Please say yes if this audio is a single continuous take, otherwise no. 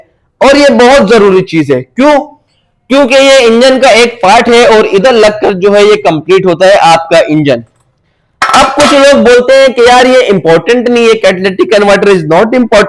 yes